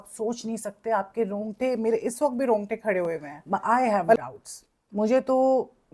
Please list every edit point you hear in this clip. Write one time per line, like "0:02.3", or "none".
0:03.3